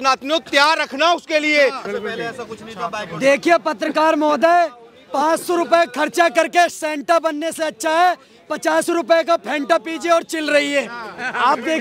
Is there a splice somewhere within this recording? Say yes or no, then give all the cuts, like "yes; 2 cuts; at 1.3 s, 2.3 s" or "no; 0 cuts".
no; 0 cuts